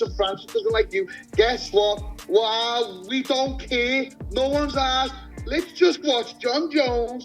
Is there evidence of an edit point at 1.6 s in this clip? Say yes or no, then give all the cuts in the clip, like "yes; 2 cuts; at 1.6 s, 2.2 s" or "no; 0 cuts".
yes; 1 cut; at 1.6 s